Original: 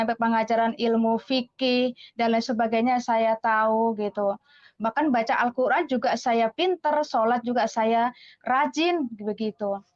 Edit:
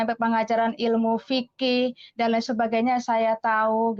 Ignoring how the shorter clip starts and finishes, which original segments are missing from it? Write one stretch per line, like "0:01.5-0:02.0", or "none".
none